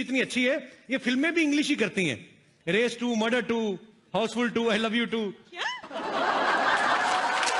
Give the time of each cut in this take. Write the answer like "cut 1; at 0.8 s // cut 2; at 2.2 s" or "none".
none